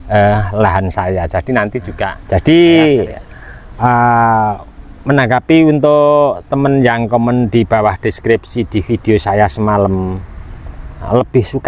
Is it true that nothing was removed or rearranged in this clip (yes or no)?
no